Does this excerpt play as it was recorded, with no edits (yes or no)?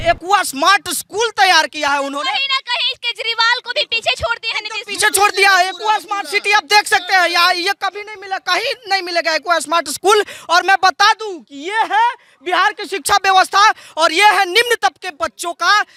yes